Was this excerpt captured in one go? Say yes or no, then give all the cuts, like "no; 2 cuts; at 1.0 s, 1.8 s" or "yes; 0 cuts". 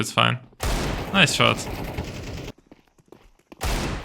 no; 1 cut; at 2.5 s